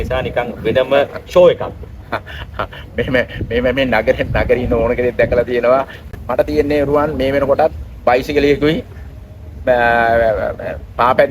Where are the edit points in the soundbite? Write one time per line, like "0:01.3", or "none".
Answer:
0:06.0

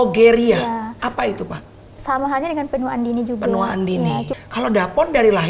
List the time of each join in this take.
0:04.3

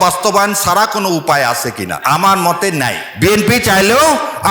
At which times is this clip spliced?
0:02.0
0:03.0

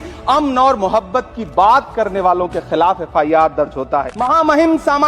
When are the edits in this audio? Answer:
0:04.1

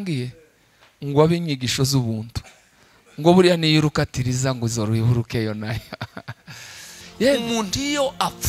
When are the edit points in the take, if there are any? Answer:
0:07.4

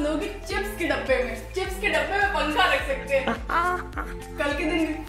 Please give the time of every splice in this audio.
none

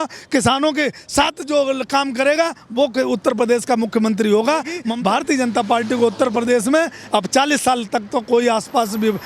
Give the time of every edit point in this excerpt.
0:04.9

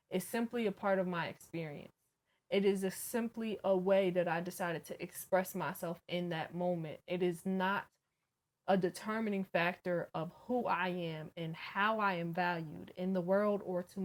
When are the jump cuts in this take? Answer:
none

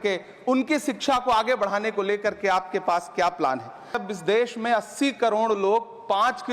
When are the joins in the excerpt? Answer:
0:04.0

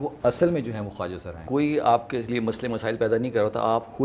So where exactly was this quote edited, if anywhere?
0:01.4

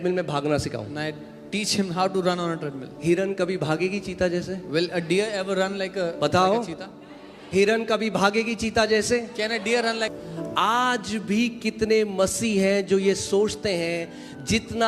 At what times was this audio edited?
0:10.1

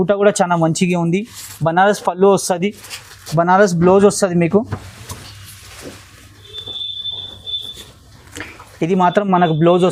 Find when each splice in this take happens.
none

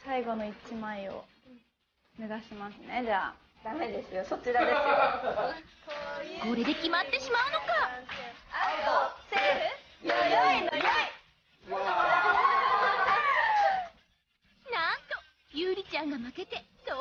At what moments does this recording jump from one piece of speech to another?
none

